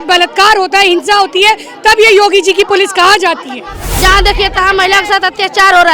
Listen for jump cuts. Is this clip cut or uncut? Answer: cut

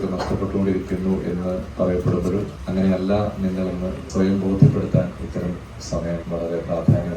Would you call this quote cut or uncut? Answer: cut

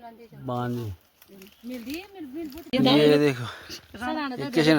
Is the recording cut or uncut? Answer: cut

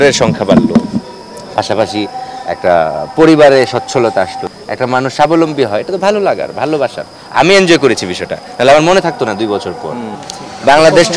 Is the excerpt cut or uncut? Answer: cut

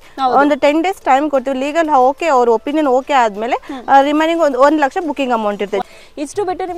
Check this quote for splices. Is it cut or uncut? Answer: cut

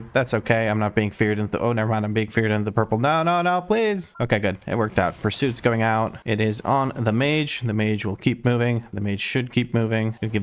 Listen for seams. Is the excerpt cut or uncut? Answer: uncut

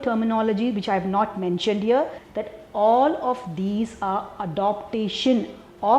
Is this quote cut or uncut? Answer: cut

